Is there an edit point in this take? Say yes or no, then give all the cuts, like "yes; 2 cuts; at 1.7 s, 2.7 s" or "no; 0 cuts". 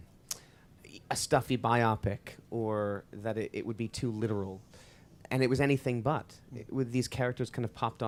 no; 0 cuts